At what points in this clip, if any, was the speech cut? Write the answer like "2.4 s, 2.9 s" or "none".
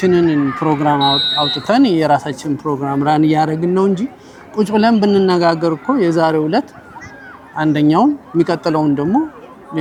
none